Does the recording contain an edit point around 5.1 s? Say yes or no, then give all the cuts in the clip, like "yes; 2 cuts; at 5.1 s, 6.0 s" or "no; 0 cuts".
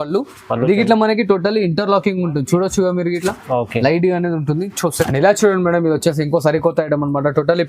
yes; 1 cut; at 5.1 s